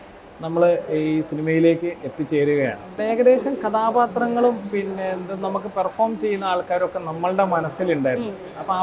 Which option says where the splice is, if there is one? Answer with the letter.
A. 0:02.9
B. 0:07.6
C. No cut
A